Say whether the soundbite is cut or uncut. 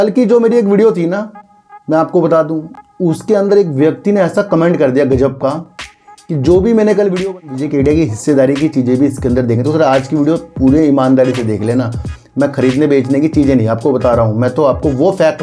cut